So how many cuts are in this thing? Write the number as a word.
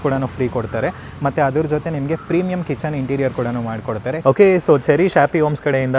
one